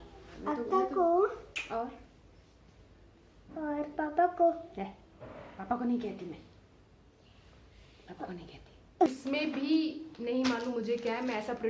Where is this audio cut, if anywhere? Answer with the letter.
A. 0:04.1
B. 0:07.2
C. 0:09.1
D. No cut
C